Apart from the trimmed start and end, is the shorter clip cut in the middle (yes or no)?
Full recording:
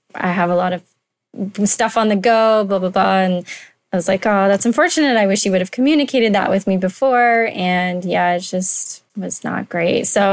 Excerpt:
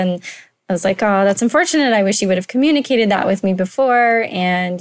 no